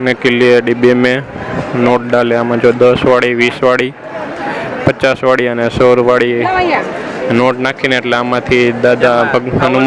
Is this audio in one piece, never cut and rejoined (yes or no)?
yes